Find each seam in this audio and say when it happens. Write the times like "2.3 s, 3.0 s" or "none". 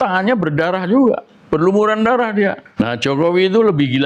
2.6 s